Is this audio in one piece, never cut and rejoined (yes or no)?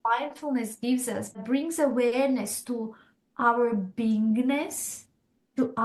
no